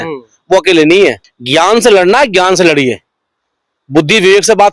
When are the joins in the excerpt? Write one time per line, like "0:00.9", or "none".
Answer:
none